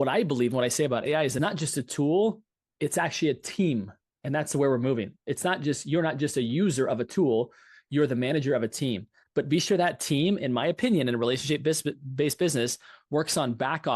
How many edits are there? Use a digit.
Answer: 1